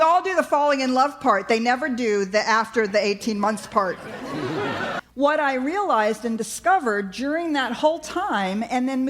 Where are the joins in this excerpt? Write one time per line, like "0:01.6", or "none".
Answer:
0:05.0